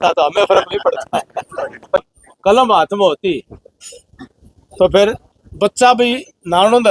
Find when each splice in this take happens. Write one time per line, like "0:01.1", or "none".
0:02.0